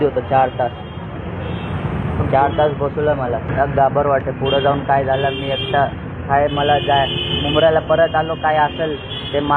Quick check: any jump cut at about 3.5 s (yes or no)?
yes